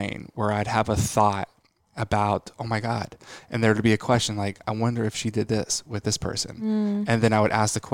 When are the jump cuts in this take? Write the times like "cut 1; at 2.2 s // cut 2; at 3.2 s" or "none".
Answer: none